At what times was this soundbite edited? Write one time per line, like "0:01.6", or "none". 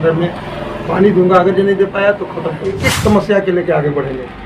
0:02.9